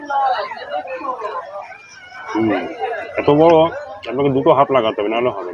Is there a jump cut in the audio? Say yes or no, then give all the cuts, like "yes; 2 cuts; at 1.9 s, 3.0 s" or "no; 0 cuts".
no; 0 cuts